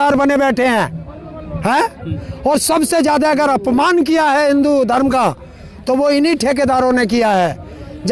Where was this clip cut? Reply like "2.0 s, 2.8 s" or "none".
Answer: none